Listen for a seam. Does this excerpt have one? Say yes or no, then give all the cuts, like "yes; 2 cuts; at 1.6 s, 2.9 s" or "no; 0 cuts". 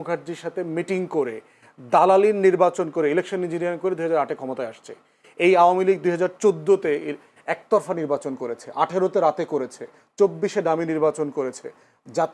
no; 0 cuts